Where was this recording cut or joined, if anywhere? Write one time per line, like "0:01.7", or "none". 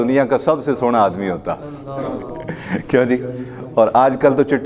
none

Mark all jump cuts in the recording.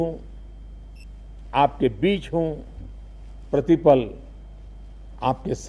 none

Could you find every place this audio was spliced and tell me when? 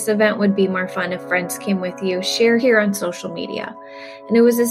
0:02.6

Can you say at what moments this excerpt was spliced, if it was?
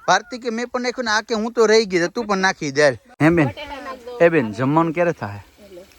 0:03.1

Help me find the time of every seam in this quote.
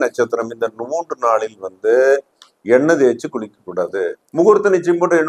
0:04.1

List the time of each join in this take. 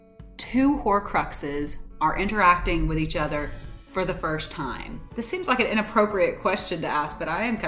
0:04.9

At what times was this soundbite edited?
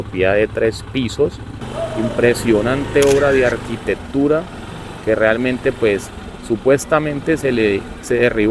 0:01.6

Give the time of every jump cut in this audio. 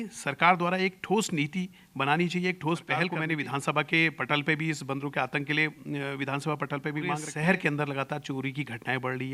0:03.2
0:07.3

